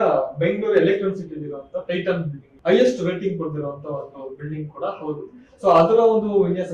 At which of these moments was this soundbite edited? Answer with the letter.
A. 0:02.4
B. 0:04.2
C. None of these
A